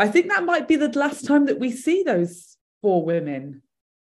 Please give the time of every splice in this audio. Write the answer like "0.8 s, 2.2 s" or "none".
none